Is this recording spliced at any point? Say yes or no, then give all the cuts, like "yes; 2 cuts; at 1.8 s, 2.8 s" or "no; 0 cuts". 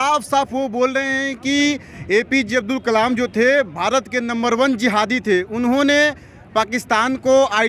no; 0 cuts